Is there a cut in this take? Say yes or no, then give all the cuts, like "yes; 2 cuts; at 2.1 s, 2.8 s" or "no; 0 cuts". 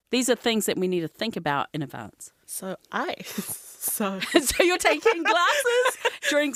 no; 0 cuts